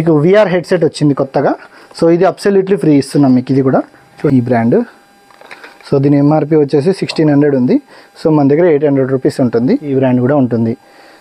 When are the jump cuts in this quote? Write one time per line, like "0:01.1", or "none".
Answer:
0:04.3
0:09.9